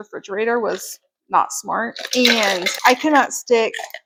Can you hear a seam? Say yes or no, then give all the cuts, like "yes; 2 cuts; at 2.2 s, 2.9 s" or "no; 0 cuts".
no; 0 cuts